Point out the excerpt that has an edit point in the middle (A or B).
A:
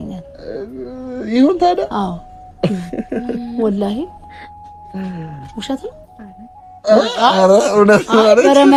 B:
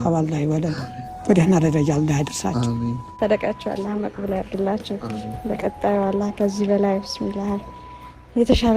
B